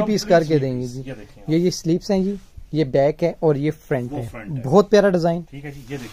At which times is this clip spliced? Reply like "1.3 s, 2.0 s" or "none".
none